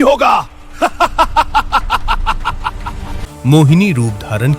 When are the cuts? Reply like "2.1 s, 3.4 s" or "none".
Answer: 3.2 s